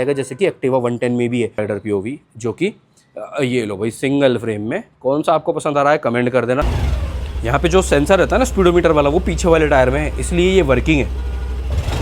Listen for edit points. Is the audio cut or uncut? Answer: cut